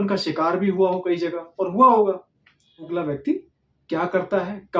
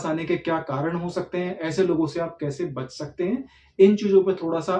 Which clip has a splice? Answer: first; 1 cut; at 2.9 s

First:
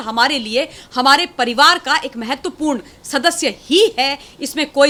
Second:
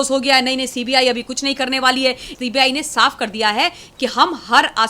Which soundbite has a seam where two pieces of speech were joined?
second; 1 cut; at 2.3 s

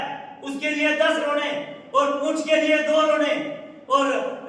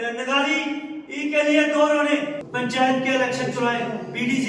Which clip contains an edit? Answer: second; 1 cut; at 2.4 s

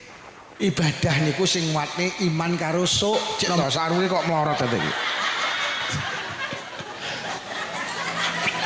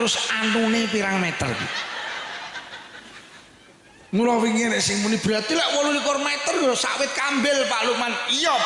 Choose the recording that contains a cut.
first; 1 cut; at 3.4 s

